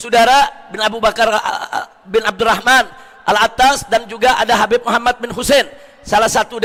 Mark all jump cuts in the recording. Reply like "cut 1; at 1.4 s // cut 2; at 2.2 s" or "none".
none